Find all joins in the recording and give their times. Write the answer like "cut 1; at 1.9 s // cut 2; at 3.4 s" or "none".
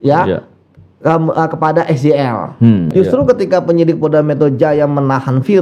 cut 1; at 2.9 s